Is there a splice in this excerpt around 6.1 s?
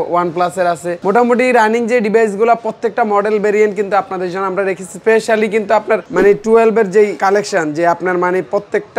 yes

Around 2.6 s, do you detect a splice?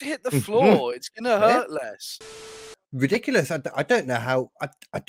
yes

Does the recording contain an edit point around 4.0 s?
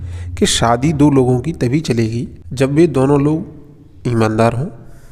no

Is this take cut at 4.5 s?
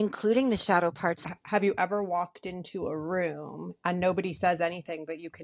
no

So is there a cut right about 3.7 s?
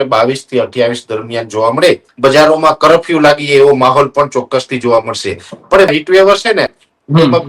no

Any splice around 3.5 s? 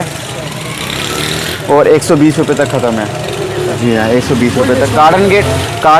no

